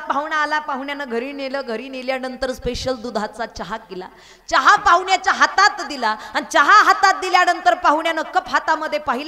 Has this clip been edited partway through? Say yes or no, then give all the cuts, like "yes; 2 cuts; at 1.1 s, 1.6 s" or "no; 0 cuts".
no; 0 cuts